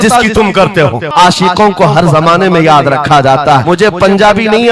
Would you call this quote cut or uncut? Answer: cut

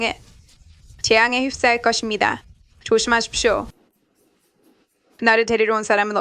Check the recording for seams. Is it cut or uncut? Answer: cut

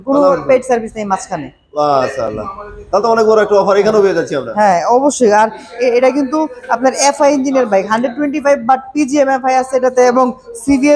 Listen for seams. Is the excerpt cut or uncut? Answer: uncut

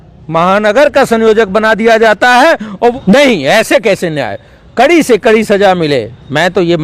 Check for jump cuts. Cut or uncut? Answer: cut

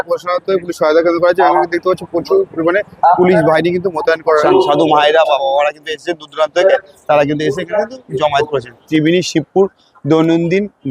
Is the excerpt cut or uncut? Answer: cut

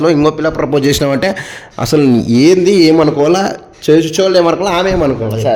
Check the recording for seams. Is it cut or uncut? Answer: uncut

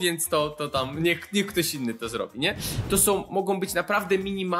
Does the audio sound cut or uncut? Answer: cut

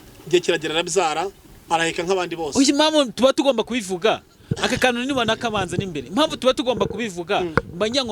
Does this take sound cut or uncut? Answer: uncut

